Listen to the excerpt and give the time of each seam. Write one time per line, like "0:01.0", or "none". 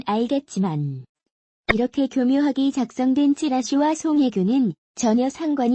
0:04.5